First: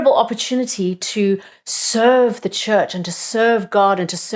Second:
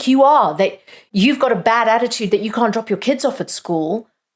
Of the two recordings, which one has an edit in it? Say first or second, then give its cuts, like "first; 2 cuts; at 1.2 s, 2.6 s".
second; 1 cut; at 1.0 s